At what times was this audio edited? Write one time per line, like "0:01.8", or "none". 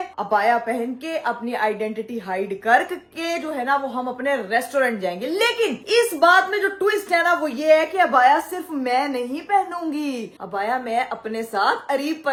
none

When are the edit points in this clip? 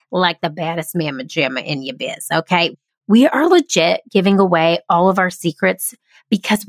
0:02.7

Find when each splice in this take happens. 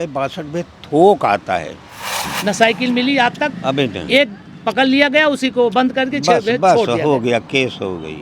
0:02.3

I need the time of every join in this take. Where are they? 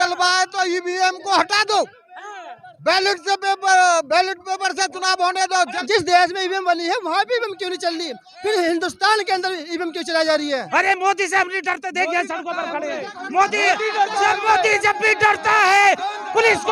0:05.8
0:10.7

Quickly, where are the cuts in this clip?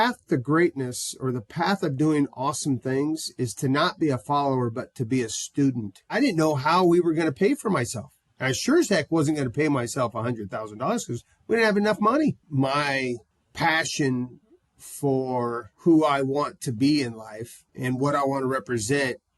0:06.2
0:12.4

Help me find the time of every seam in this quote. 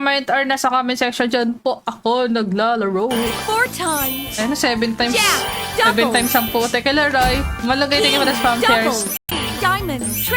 0:09.2

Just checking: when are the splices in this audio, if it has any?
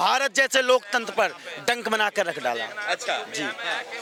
none

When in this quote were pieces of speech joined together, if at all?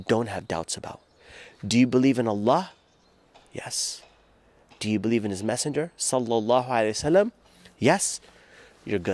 none

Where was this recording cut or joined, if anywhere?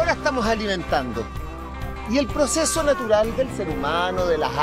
none

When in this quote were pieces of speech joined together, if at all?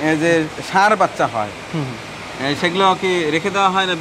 none

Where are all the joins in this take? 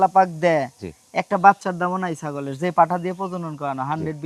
none

